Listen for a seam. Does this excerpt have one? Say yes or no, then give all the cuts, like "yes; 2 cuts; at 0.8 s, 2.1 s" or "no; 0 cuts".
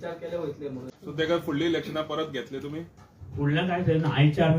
yes; 1 cut; at 0.9 s